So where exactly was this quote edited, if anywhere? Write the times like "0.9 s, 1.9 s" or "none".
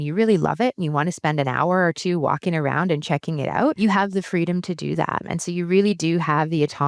3.8 s, 5.2 s